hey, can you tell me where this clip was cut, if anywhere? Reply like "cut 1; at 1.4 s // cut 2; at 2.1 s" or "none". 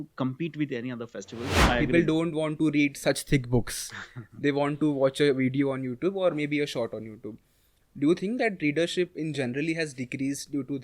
cut 1; at 1.5 s